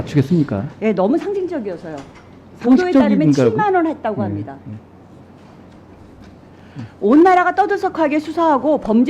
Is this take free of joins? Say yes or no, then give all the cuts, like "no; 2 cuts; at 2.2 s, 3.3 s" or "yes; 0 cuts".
yes; 0 cuts